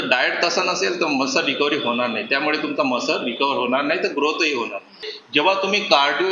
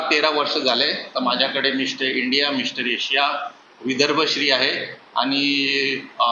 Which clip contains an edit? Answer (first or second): first